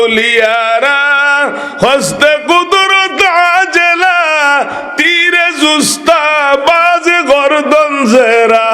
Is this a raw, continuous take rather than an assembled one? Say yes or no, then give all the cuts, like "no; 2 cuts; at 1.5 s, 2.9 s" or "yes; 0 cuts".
yes; 0 cuts